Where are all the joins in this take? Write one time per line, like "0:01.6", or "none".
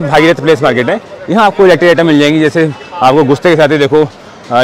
none